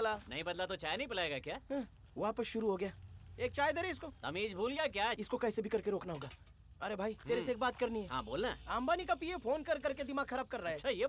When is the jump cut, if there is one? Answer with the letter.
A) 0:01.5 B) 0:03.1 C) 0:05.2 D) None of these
C